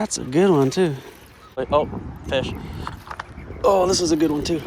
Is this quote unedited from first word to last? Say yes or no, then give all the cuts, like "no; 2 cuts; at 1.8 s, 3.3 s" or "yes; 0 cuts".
no; 1 cut; at 1.6 s